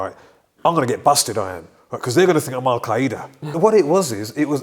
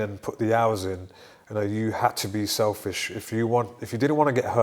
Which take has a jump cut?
first; 1 cut; at 3.6 s

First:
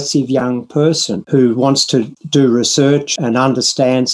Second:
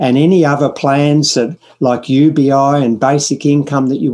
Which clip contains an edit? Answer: first; 3 cuts; at 1.1 s, 2.2 s, 3.1 s

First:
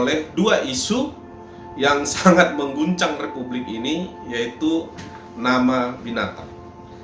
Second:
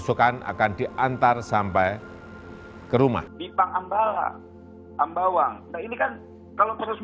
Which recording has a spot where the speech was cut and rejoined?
second; 1 cut; at 3.4 s

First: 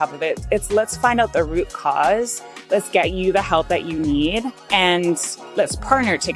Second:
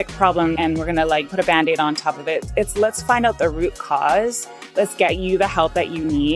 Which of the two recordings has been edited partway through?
first; 1 cut; at 5.4 s

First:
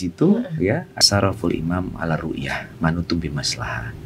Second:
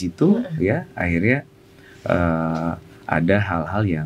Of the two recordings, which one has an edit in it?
first; 1 cut; at 1.0 s

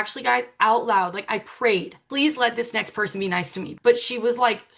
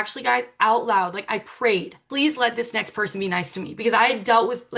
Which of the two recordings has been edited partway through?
first; 1 cut; at 3.7 s

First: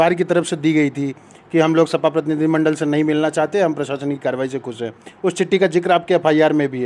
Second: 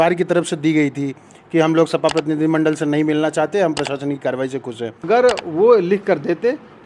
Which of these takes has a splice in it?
second; 1 cut; at 5.0 s

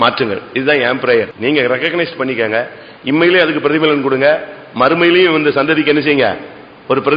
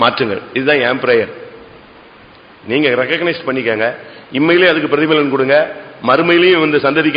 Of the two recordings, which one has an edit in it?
first; 1 cut; at 1.3 s

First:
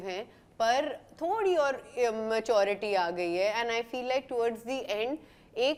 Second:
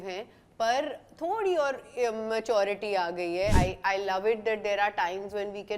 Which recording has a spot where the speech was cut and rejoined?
second; 1 cut; at 3.6 s

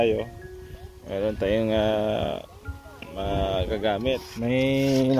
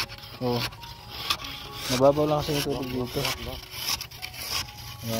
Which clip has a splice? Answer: first; 1 cut; at 4.3 s

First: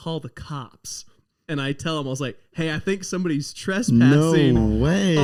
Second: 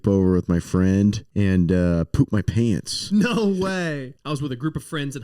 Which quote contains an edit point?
second; 2 cuts; at 1.2 s, 4.1 s

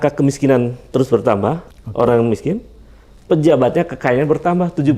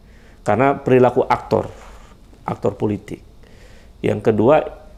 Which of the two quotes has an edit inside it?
first; 1 cut; at 1.8 s

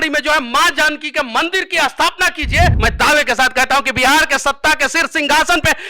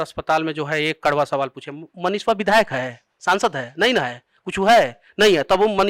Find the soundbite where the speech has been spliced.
first; 1 cut; at 2.8 s

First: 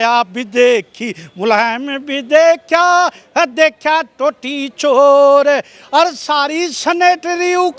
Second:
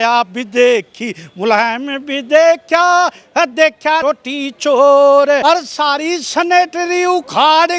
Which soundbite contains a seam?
second; 2 cuts; at 4.0 s, 5.4 s

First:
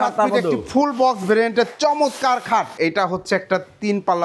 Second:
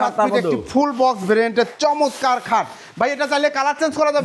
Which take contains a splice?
first; 1 cut; at 2.7 s

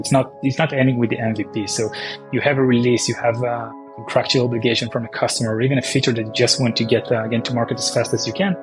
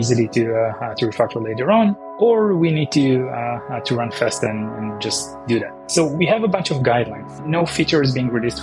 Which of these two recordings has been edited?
second; 2 cuts; at 2.1 s, 5.8 s

